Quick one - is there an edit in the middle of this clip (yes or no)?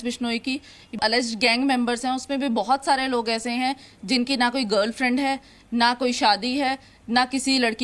yes